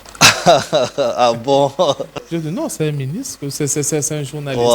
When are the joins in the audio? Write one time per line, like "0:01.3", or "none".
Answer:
0:02.2